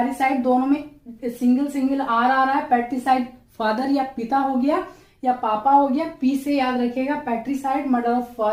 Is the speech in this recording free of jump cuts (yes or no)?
yes